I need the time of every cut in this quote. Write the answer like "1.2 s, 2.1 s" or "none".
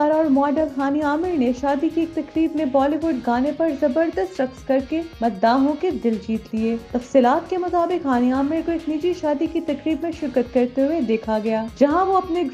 none